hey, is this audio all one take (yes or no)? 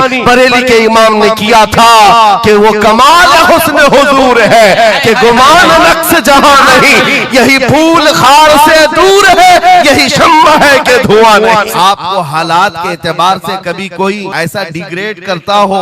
no